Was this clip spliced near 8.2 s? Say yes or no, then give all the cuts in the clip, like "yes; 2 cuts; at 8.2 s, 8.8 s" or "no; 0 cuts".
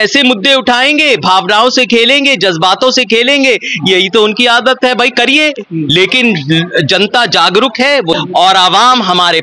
yes; 1 cut; at 8.2 s